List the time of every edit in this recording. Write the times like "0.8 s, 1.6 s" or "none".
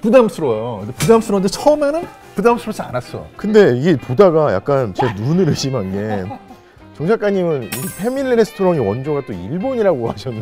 3.2 s